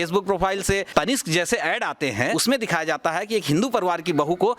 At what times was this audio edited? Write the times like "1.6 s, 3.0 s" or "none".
0.9 s, 2.3 s